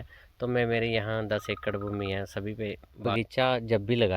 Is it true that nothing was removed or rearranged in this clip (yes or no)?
no